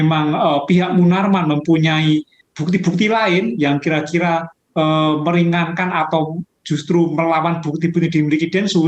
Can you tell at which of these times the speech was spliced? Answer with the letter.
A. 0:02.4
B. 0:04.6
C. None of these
A